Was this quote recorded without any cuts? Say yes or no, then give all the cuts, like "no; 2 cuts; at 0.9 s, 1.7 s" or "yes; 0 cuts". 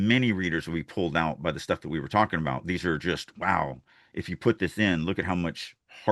yes; 0 cuts